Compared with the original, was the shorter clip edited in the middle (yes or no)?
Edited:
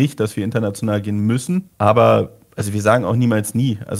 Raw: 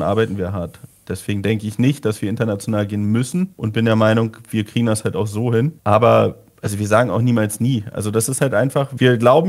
yes